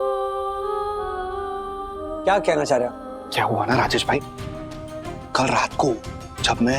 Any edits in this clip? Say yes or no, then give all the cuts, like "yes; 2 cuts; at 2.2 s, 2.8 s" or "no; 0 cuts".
yes; 1 cut; at 2.2 s